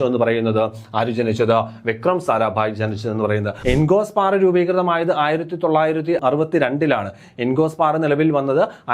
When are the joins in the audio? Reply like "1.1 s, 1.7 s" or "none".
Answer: 3.5 s, 6.2 s